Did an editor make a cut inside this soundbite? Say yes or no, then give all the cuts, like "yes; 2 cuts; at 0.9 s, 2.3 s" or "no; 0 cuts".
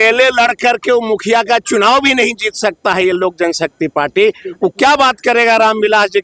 no; 0 cuts